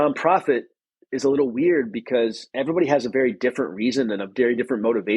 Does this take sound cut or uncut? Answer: cut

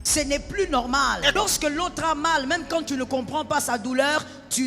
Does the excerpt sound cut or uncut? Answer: cut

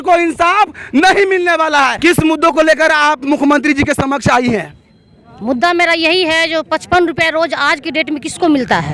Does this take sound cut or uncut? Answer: uncut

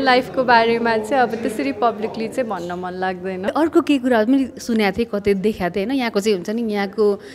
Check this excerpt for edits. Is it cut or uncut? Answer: cut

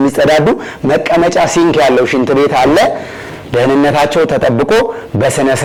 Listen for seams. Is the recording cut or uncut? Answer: uncut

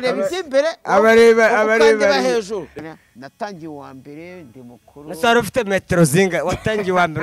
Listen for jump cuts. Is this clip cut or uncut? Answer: cut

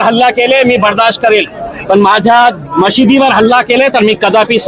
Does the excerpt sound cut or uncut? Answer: uncut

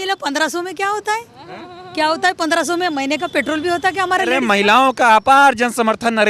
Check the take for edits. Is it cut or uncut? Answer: cut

